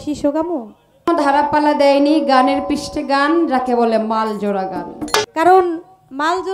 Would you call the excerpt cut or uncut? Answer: cut